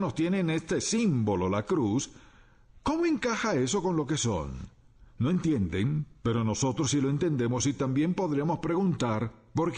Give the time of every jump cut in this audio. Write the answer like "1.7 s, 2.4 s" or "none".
5.7 s